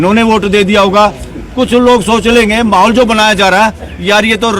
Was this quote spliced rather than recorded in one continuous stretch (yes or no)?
no